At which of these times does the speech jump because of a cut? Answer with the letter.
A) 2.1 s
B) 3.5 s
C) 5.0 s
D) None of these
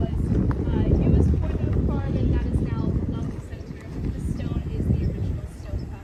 D